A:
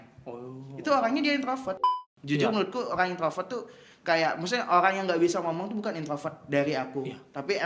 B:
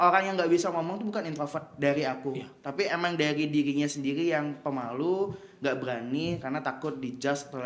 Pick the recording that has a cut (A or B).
A